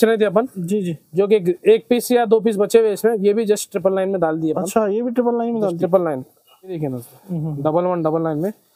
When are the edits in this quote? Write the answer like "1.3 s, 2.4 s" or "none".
6.8 s

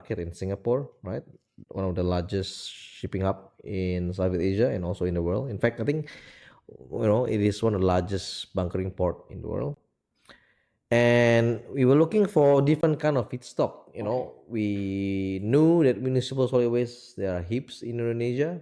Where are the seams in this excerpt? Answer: none

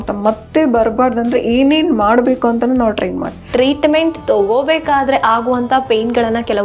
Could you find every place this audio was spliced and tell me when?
3.5 s

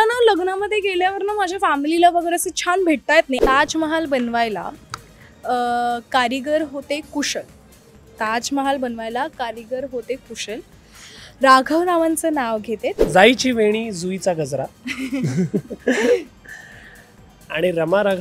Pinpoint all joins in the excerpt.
3.4 s, 13.0 s

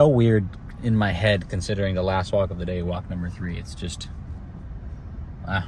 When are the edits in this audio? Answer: none

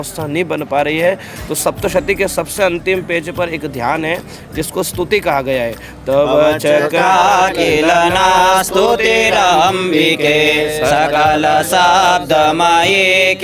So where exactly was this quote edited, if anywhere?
none

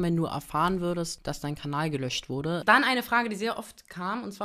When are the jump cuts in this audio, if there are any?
1.2 s, 2.6 s

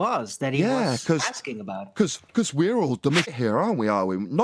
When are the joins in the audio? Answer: 3.3 s

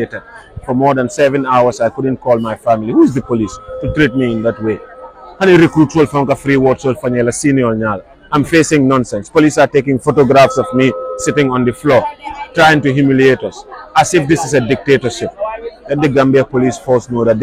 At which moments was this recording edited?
none

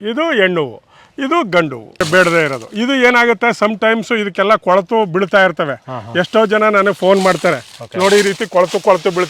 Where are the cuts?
2.1 s

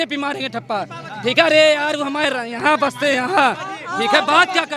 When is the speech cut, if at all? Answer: none

